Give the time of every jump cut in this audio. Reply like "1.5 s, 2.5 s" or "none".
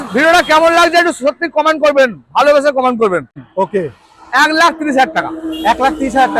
3.4 s